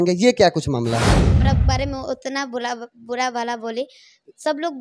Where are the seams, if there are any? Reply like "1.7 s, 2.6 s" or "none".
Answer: 1.4 s